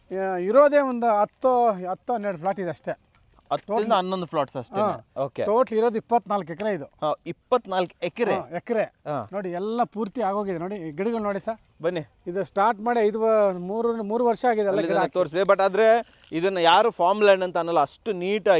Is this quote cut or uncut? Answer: uncut